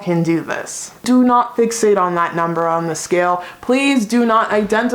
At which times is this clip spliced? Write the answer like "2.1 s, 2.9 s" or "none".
1.1 s